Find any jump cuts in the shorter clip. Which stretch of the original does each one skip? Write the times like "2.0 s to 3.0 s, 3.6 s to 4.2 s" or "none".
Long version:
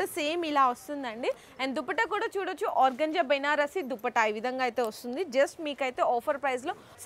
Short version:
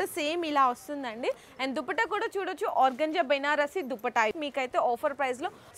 4.3 s to 5.6 s